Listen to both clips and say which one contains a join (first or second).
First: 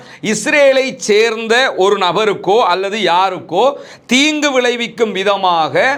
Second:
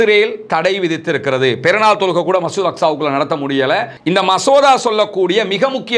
second